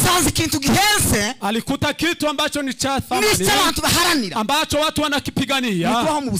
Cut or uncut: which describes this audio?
uncut